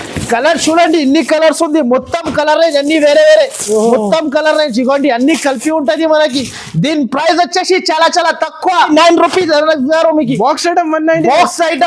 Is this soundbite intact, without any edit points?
no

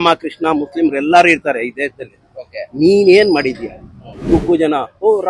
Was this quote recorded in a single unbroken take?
no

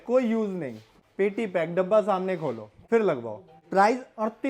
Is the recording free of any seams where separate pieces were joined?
no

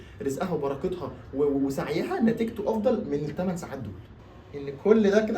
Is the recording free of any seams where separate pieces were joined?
no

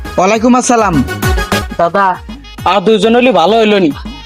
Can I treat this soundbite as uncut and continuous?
no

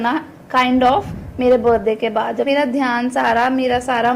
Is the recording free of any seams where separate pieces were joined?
no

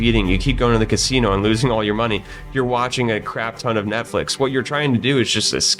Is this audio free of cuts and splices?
yes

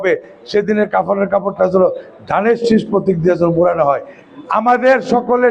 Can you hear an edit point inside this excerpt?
yes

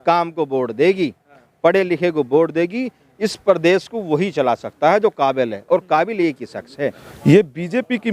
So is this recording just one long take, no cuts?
no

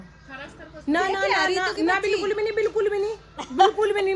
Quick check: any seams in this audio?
no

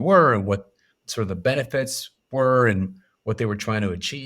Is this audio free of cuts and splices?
yes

